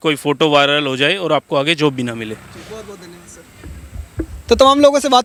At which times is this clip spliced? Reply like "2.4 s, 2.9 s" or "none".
none